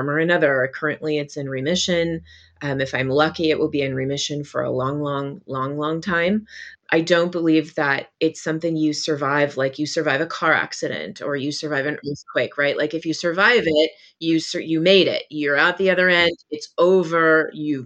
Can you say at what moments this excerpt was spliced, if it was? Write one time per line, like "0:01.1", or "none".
0:06.7